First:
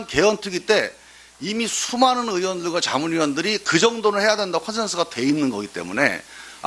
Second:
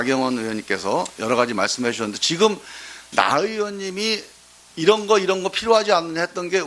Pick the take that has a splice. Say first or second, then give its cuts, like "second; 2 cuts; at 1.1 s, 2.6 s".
second; 1 cut; at 2.6 s